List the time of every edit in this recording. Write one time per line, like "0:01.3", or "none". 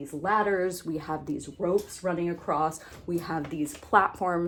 none